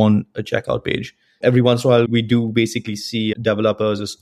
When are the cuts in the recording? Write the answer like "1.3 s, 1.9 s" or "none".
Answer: 1.4 s, 2.1 s, 3.3 s